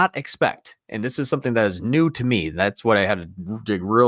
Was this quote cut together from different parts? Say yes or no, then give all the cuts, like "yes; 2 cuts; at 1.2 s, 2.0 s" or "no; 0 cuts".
no; 0 cuts